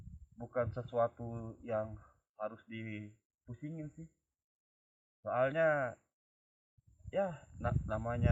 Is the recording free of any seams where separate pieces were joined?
yes; 0 cuts

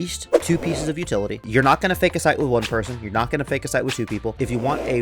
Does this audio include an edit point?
yes; 1 cut; at 1.5 s

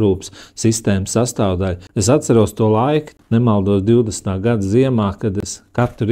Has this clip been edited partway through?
yes; 2 cuts; at 1.9 s, 3.1 s

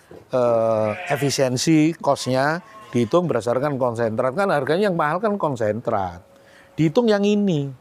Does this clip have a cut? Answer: no; 0 cuts

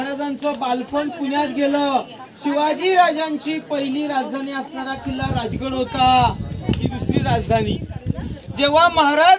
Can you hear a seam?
no; 0 cuts

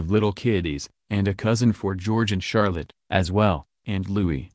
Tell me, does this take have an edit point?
no; 0 cuts

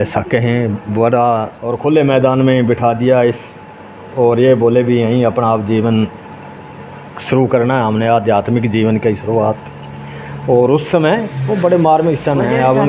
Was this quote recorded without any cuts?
no; 1 cut; at 1.6 s

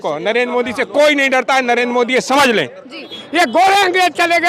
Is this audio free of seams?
no; 1 cut; at 3.1 s

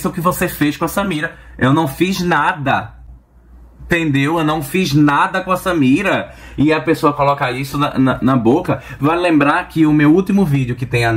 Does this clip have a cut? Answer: no; 0 cuts

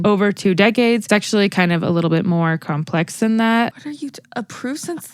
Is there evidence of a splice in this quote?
yes; 2 cuts; at 1.0 s, 3.7 s

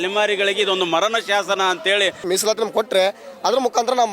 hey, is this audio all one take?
no; 1 cut; at 2.2 s

